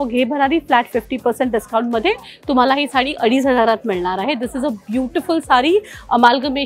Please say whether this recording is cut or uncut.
uncut